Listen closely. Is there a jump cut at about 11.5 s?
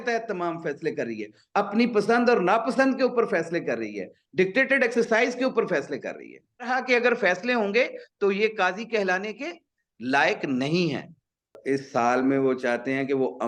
yes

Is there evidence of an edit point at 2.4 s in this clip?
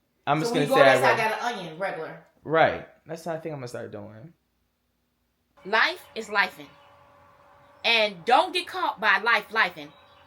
no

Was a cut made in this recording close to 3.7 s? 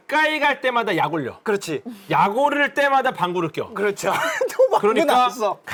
no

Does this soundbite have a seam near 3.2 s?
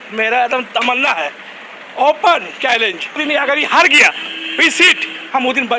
yes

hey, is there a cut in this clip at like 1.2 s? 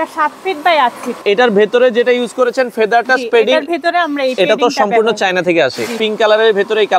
yes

